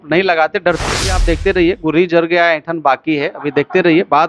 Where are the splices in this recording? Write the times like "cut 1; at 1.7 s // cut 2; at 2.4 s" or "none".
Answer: cut 1; at 1.2 s